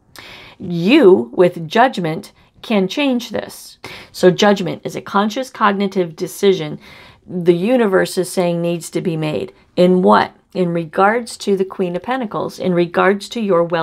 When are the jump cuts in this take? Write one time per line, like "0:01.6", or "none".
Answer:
0:03.8